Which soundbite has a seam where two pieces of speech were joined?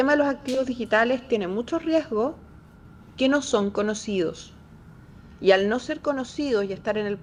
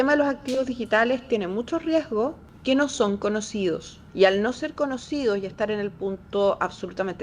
second; 2 cuts; at 2.5 s, 4.0 s

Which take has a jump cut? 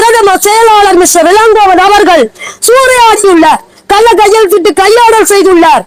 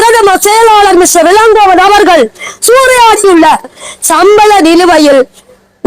second; 1 cut; at 3.8 s

